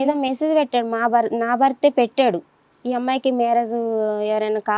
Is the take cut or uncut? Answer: cut